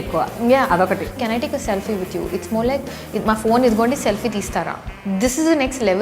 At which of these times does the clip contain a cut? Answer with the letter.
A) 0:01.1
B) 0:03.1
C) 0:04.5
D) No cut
A